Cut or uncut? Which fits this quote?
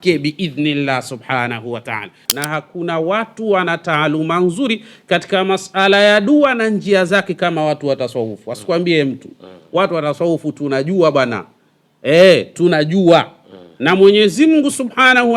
cut